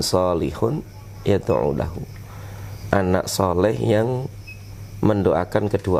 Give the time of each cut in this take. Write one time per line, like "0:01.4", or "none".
none